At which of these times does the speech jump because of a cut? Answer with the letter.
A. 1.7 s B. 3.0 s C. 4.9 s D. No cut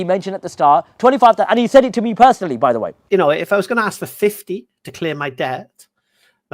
B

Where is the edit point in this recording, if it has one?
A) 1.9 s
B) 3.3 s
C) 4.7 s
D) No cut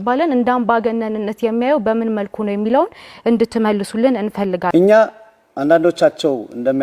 C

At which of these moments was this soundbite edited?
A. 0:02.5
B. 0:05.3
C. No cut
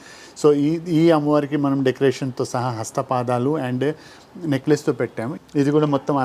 B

